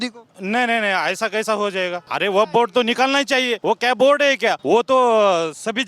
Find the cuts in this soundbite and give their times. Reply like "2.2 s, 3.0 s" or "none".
2.0 s, 3.5 s, 4.6 s